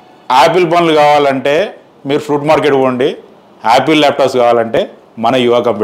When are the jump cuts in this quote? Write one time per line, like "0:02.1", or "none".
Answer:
none